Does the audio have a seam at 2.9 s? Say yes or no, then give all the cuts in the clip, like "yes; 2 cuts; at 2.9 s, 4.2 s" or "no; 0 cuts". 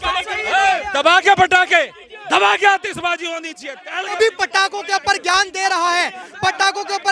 no; 1 cut; at 4.1 s